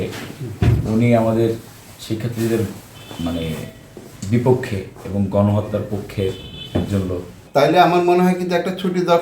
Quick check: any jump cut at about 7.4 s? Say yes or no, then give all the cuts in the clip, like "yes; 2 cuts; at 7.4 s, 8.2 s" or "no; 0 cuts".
yes; 1 cut; at 7.4 s